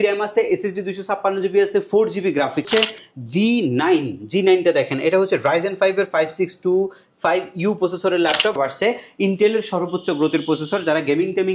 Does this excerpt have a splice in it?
yes; 2 cuts; at 2.7 s, 8.6 s

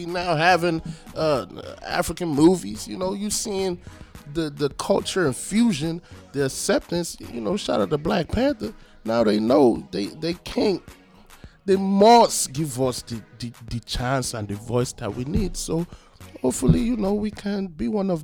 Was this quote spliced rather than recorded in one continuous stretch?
no; 0 cuts

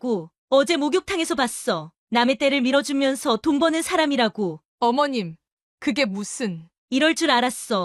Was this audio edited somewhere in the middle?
yes; 1 cut; at 4.6 s

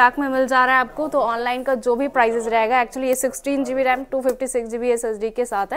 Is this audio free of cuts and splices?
yes; 0 cuts

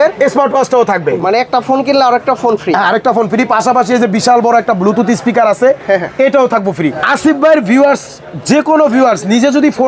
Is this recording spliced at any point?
yes; 2 cuts; at 1.2 s, 7.0 s

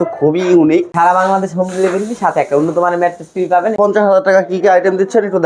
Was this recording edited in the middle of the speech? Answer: yes; 2 cuts; at 0.9 s, 3.8 s

